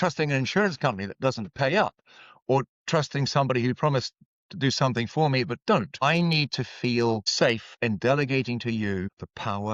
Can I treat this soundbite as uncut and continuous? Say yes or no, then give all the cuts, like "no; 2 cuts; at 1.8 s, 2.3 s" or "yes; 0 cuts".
yes; 0 cuts